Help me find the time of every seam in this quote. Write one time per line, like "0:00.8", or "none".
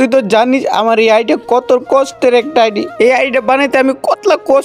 none